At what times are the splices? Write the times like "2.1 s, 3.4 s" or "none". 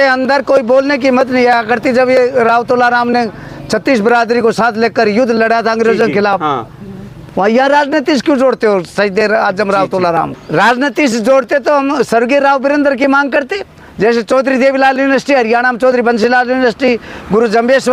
10.3 s